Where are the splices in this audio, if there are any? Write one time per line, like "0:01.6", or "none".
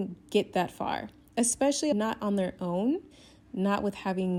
none

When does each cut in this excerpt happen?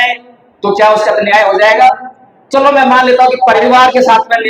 0:03.6

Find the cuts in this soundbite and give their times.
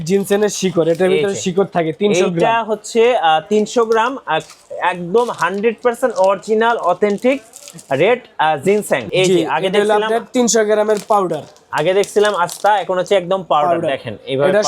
0:09.1

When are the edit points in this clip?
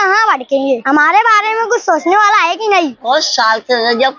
0:00.8
0:03.1

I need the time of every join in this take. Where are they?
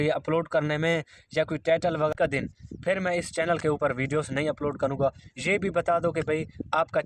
0:02.1

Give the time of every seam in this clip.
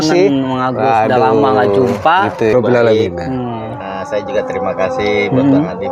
0:02.5

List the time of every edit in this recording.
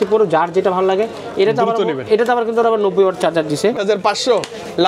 0:03.8

